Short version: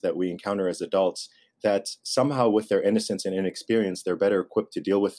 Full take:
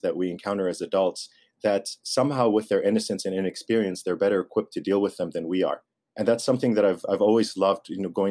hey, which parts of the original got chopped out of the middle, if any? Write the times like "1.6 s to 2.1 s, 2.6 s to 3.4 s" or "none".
none

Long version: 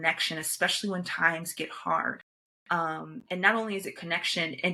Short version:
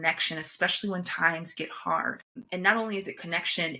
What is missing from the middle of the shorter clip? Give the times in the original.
2.3 s to 3.1 s

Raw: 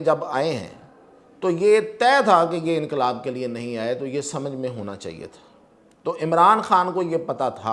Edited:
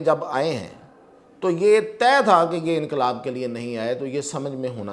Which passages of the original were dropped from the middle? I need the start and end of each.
none

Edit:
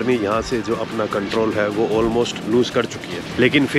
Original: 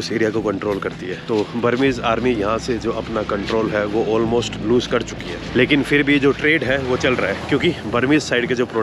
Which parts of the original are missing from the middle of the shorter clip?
none

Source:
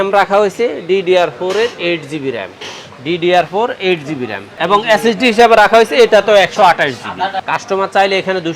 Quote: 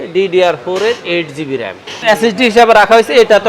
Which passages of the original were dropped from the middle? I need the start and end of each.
2.8 s to 4.8 s

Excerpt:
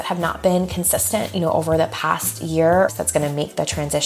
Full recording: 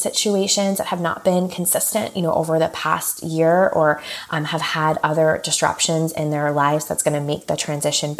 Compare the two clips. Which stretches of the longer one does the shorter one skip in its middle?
3.7 s to 6.8 s

